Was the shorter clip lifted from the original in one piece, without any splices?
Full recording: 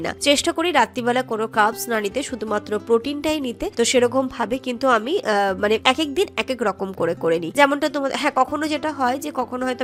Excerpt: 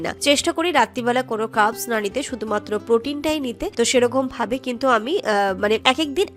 yes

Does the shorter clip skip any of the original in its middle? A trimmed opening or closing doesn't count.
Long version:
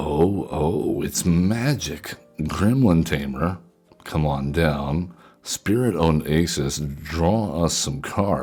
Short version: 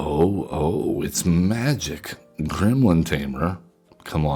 no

